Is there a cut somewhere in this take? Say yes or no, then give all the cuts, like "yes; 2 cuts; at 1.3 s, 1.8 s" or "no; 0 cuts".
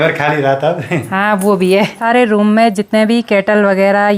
yes; 1 cut; at 2.0 s